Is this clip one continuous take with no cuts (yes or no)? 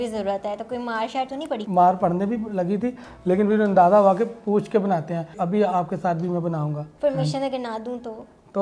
no